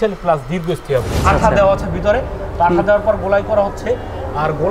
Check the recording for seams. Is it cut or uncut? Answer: cut